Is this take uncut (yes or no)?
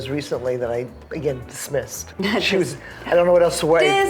no